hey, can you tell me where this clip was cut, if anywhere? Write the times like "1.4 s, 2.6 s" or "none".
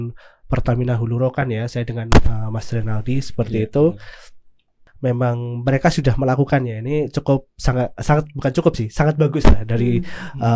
none